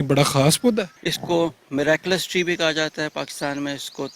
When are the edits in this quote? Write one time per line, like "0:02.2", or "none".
0:00.9